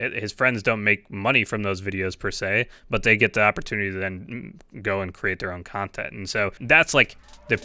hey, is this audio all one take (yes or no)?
no